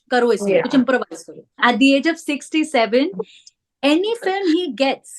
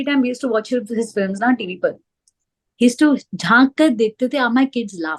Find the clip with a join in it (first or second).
first